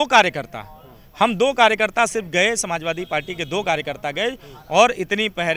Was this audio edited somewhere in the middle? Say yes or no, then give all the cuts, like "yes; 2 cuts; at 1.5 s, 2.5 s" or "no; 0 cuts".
no; 0 cuts